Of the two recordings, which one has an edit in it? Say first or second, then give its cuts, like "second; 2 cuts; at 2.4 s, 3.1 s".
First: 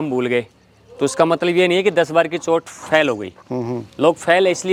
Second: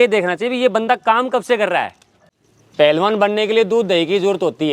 second; 1 cut; at 2.1 s